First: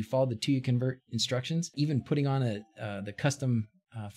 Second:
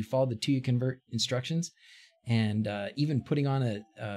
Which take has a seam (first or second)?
first